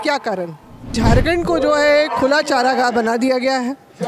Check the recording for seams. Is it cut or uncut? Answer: cut